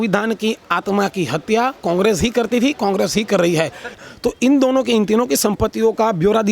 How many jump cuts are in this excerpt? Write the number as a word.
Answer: one